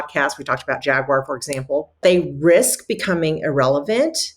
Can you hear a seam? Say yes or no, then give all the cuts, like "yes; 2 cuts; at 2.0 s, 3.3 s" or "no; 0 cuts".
yes; 1 cut; at 2.0 s